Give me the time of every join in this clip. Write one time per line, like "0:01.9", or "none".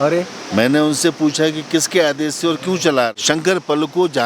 0:03.2